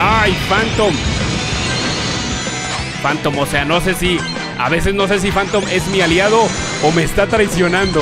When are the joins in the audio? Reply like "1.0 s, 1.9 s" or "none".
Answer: none